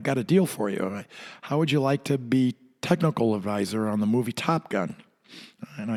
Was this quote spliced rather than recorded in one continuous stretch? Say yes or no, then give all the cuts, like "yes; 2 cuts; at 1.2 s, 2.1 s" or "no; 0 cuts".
no; 0 cuts